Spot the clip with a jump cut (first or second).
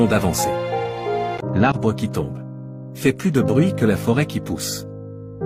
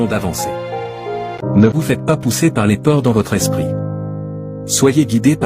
second